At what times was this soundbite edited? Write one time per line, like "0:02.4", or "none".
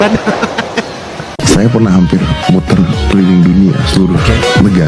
0:01.2